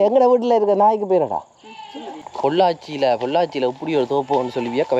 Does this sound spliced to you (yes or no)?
yes